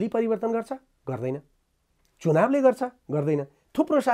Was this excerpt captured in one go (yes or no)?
yes